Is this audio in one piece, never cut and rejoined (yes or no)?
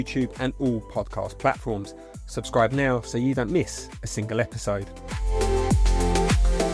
yes